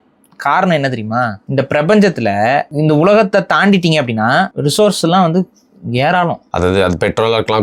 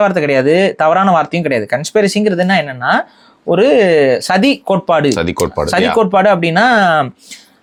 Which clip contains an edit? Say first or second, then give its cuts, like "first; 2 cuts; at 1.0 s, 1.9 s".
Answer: first; 4 cuts; at 1.4 s, 2.7 s, 4.5 s, 6.4 s